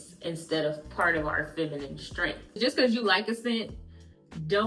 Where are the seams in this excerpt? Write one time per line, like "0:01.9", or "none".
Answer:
0:02.4